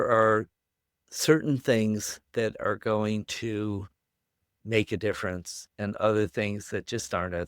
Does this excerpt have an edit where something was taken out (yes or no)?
no